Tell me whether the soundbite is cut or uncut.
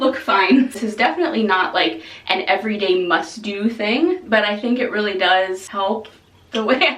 cut